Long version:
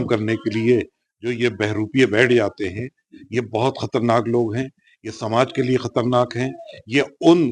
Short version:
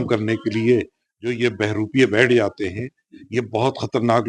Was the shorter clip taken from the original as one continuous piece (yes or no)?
yes